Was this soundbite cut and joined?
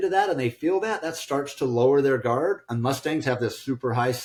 no; 0 cuts

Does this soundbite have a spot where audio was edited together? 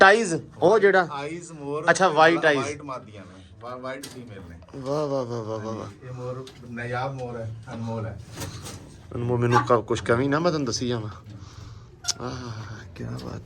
no; 0 cuts

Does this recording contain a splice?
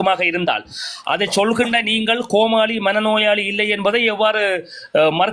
no; 0 cuts

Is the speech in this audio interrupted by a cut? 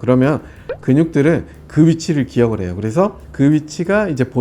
yes; 1 cut; at 3.2 s

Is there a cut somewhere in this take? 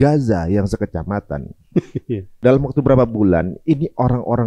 yes; 1 cut; at 2.4 s

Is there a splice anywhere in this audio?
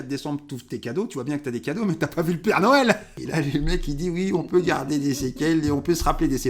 yes; 1 cut; at 3.1 s

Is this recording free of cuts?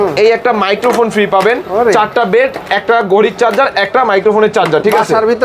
yes; 0 cuts

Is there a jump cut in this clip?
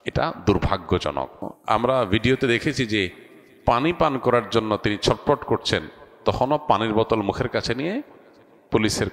yes; 1 cut; at 1.5 s

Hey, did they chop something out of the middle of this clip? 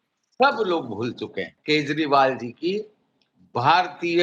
yes; 1 cut; at 1.5 s

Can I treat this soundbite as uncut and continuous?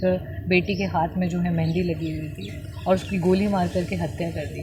yes; 0 cuts

